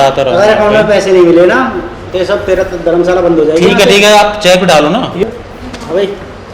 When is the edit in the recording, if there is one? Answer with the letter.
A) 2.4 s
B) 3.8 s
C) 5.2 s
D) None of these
C